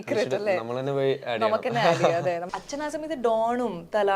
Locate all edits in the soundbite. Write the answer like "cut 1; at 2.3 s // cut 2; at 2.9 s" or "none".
cut 1; at 2.5 s